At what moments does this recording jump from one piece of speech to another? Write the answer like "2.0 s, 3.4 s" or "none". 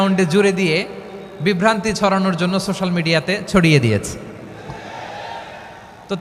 none